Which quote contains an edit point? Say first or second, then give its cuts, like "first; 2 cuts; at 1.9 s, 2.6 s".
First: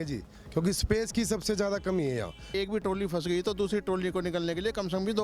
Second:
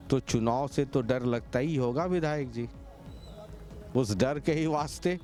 first; 1 cut; at 2.5 s